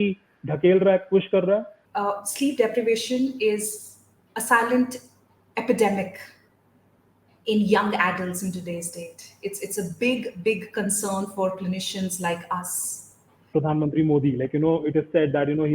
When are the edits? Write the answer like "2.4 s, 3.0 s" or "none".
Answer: 1.8 s, 13.5 s